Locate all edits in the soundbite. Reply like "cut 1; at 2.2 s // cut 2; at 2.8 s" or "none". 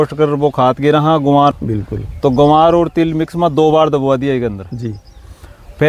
cut 1; at 1.6 s